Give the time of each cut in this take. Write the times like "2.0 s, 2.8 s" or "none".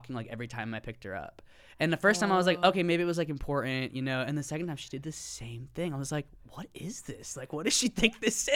none